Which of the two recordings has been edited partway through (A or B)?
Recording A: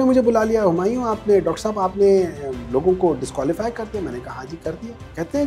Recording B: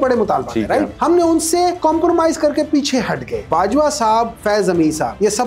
B